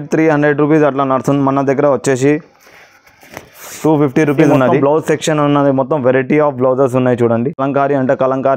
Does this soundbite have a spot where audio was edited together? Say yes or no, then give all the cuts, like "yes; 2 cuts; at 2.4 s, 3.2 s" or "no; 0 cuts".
yes; 2 cuts; at 4.8 s, 7.6 s